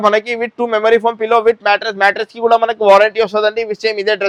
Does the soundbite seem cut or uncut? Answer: uncut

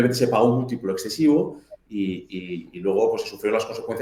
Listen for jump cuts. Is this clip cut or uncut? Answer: uncut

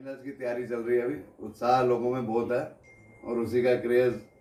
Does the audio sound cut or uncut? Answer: uncut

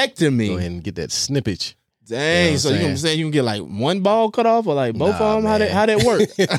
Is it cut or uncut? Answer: uncut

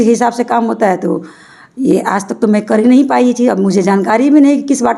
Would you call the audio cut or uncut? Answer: uncut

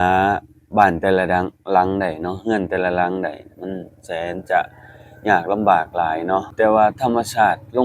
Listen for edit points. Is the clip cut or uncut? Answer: cut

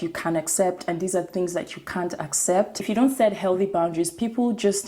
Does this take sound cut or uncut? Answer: cut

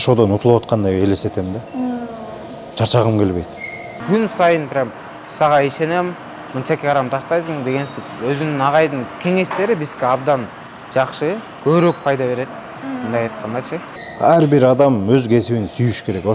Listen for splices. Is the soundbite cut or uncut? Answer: cut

